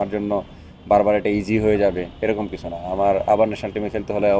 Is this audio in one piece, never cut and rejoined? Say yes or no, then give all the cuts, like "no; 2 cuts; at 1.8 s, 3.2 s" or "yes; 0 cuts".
yes; 0 cuts